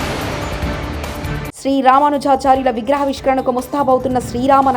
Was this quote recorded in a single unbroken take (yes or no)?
yes